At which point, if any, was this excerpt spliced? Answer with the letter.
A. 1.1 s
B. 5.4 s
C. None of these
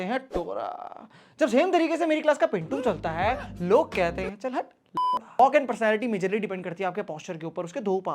C